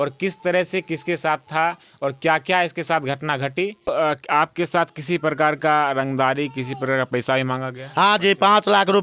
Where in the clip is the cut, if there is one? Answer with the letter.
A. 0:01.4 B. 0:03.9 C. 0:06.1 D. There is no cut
B